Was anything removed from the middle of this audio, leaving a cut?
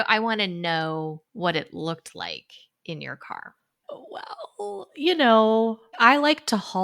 yes; 1 cut; at 3.7 s

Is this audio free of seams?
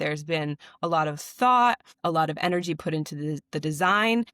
no; 1 cut; at 1.9 s

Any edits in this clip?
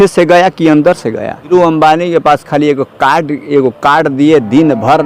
yes; 1 cut; at 1.5 s

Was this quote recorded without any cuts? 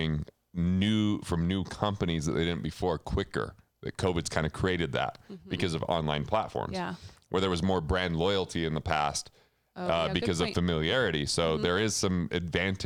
yes; 0 cuts

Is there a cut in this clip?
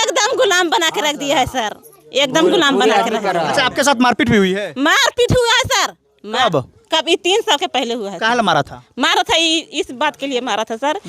no; 0 cuts

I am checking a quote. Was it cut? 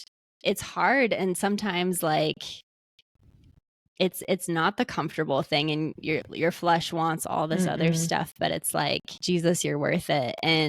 yes; 1 cut; at 9.1 s

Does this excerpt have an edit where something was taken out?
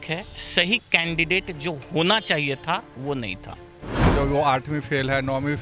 yes; 1 cut; at 4.0 s

